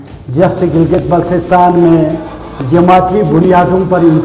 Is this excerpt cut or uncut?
uncut